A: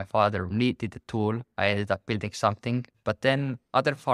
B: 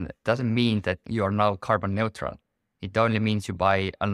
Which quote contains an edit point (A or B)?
A